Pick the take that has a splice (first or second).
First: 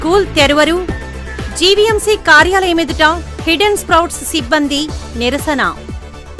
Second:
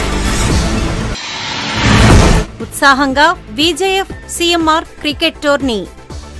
second